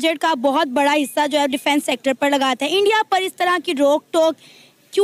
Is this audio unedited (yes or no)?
yes